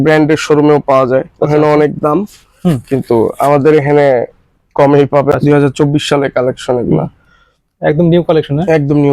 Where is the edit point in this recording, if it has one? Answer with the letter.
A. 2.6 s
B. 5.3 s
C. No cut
B